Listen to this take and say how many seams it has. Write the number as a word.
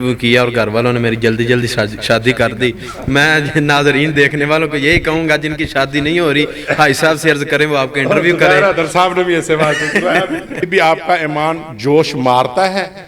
one